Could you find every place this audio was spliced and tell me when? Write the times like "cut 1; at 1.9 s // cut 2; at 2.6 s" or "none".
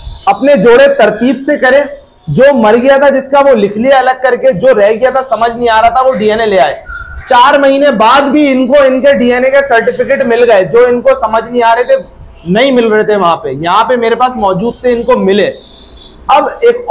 none